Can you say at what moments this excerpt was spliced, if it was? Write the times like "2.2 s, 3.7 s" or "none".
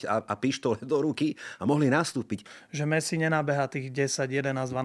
2.5 s